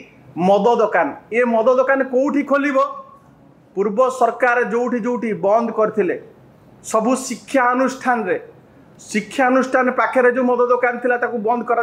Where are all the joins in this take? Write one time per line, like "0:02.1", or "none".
none